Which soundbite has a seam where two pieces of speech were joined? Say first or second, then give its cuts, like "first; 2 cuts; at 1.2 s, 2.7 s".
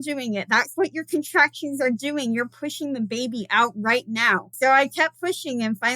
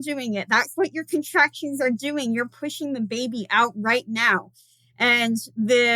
first; 1 cut; at 4.5 s